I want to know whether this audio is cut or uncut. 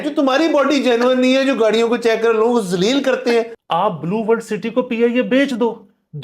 cut